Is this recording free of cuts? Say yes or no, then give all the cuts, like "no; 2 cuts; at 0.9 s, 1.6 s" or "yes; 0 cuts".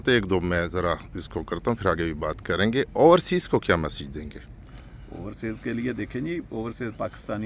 yes; 0 cuts